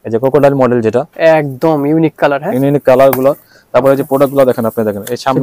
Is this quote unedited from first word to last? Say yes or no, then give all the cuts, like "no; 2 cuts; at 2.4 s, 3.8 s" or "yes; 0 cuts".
yes; 0 cuts